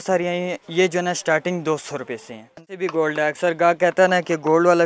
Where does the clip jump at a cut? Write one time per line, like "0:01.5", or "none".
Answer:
0:02.8